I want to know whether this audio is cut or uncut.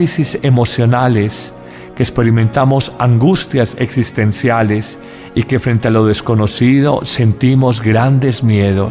uncut